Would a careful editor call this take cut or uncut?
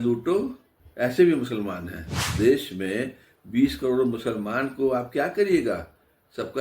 cut